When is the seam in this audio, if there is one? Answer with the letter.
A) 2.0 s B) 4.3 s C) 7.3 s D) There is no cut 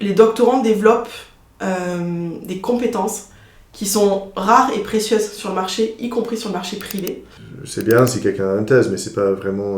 C